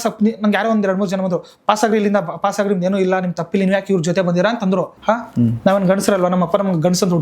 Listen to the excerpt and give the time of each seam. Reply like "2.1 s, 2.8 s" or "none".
4.9 s